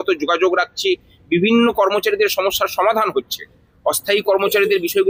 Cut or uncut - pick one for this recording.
uncut